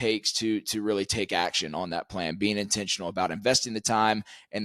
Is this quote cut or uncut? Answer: uncut